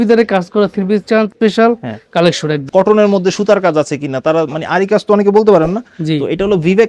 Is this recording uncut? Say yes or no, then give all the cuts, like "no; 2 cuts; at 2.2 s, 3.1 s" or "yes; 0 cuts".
no; 2 cuts; at 1.3 s, 2.6 s